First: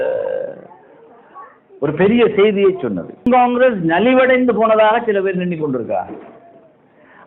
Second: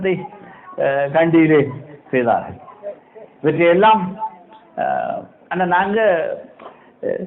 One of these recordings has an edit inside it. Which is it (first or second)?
first